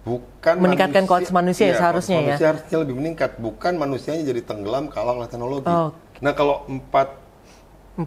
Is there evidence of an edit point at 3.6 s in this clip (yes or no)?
no